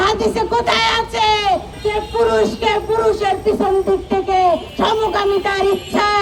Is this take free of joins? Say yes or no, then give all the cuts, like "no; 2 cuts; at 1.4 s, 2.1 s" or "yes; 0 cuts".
no; 2 cuts; at 1.7 s, 4.7 s